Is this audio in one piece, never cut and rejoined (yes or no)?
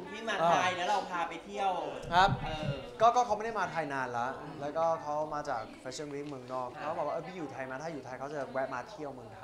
no